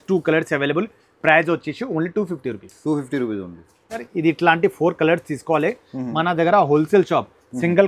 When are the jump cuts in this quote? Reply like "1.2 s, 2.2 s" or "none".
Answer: none